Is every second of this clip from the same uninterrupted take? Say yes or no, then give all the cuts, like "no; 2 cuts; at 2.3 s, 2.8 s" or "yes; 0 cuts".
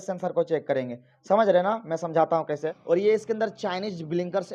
no; 1 cut; at 2.7 s